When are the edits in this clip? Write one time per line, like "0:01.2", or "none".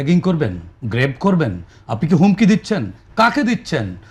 none